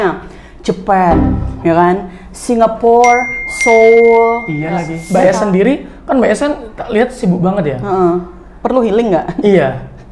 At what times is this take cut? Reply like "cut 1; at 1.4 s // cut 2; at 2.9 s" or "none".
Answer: cut 1; at 5.0 s